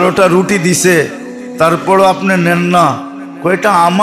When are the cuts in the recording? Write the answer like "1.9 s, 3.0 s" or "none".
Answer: none